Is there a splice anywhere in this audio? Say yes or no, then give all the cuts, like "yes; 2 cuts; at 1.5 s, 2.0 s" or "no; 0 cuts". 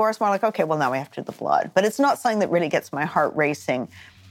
no; 0 cuts